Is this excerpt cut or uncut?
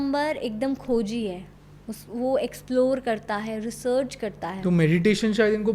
cut